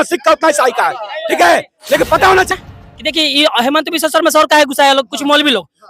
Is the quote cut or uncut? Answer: cut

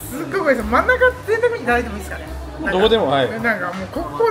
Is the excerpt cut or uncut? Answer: uncut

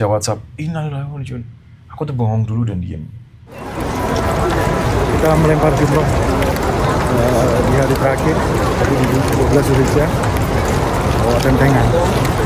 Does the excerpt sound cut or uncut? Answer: cut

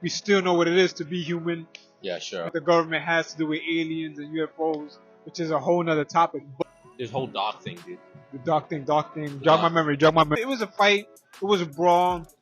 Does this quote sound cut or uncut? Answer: cut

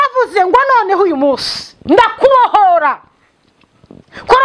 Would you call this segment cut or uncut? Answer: uncut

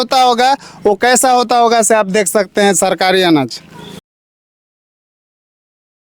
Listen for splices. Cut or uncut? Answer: uncut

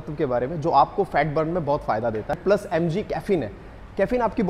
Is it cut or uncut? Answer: cut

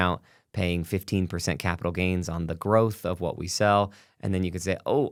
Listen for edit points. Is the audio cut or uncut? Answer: uncut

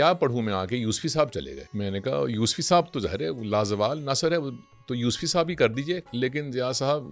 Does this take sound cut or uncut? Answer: cut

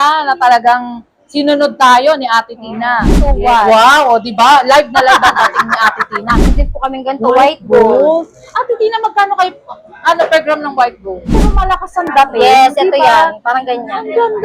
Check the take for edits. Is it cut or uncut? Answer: cut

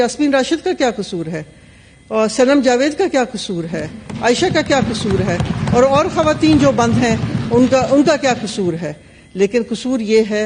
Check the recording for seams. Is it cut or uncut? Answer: uncut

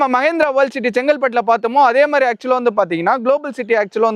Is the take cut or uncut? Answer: uncut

